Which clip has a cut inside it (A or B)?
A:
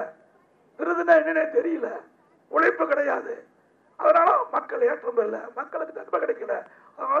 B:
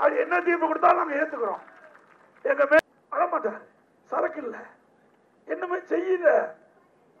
B